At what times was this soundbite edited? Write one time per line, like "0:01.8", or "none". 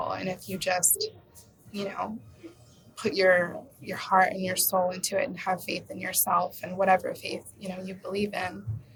none